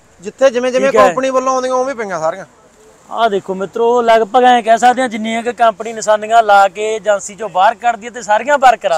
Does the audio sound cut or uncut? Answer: uncut